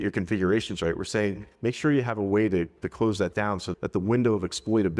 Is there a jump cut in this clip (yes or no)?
no